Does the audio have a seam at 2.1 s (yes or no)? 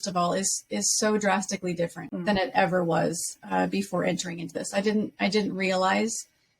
yes